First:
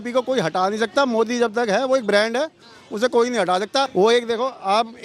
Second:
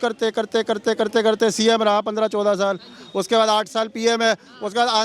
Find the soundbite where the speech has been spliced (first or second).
first